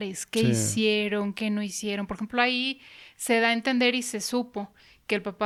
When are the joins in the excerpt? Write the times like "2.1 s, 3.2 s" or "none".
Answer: none